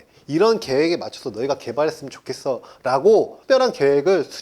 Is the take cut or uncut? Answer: cut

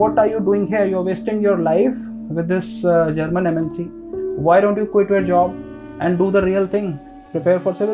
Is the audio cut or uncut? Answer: uncut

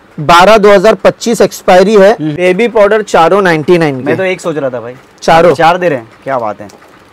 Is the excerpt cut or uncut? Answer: cut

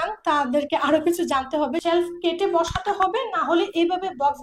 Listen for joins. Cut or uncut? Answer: cut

